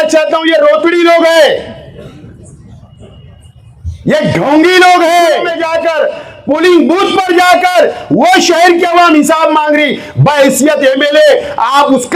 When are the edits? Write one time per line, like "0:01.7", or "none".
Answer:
0:05.6